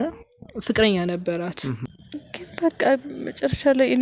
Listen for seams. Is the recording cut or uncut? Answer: cut